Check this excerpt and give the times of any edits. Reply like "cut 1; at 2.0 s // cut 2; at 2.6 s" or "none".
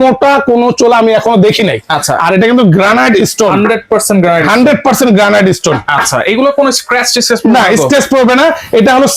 none